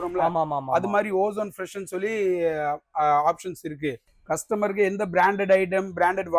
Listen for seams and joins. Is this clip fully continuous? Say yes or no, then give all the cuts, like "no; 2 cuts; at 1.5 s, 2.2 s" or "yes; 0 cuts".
no; 1 cut; at 4.1 s